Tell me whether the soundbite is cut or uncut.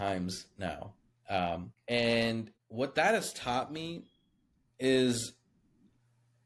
cut